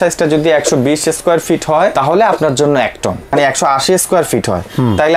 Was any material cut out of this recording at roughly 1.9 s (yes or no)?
yes